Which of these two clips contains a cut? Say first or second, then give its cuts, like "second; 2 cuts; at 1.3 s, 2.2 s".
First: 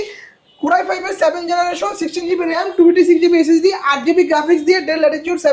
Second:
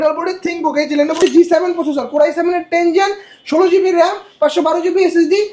second; 1 cut; at 1.2 s